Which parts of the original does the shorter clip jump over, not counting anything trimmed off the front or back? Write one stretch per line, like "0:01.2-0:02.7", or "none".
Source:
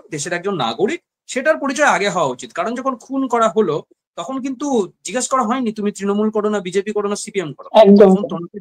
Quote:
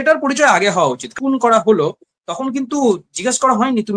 0:02.5-0:03.0